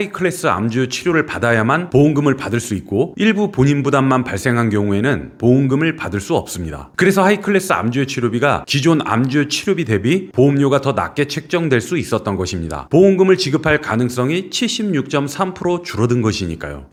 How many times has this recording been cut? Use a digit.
0